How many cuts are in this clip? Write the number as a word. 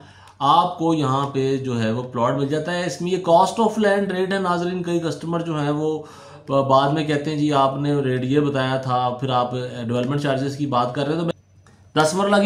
one